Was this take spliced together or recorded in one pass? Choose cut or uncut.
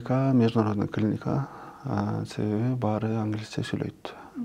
uncut